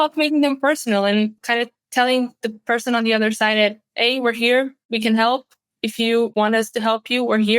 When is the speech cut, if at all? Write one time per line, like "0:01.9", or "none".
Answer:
0:01.4
0:04.8
0:06.3

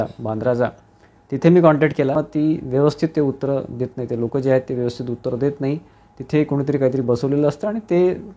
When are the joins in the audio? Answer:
none

